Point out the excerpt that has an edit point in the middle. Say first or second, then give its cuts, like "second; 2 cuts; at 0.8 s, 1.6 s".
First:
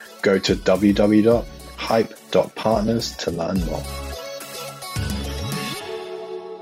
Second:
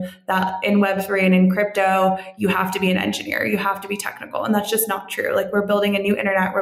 first; 1 cut; at 3.8 s